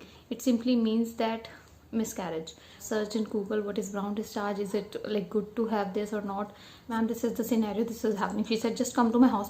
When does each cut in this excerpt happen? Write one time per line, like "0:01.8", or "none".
0:02.8
0:06.9